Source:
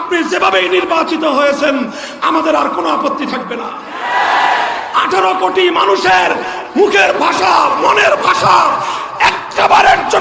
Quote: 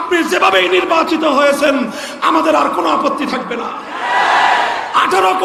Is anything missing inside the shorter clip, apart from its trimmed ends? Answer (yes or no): no